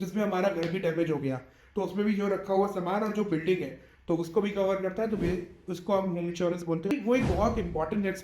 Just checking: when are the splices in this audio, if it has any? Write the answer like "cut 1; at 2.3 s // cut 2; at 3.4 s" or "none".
cut 1; at 6.9 s